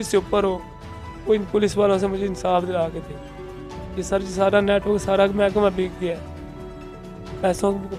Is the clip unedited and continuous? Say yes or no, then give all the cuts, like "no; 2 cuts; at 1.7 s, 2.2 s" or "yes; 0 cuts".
yes; 0 cuts